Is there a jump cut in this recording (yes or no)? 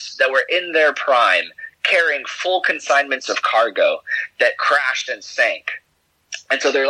no